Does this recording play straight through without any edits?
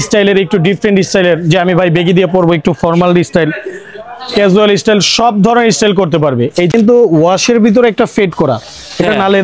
no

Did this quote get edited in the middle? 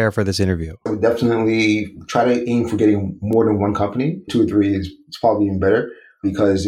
yes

